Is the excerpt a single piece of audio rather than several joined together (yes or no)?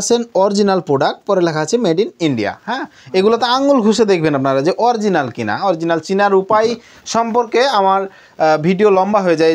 yes